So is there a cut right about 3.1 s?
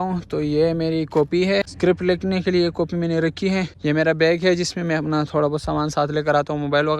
no; 1 cut; at 1.7 s

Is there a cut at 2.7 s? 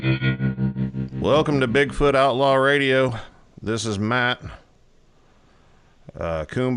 no; 1 cut; at 0.9 s

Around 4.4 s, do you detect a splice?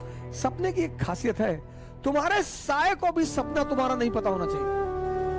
yes; 1 cut; at 4.4 s

